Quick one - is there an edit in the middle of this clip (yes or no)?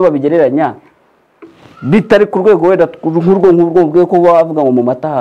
no